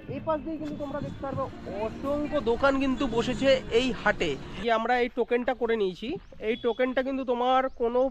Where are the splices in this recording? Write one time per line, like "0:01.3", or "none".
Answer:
0:04.6